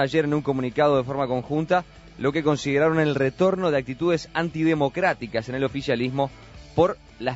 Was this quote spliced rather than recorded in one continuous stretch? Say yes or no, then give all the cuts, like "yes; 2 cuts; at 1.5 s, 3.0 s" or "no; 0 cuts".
yes; 1 cut; at 2.2 s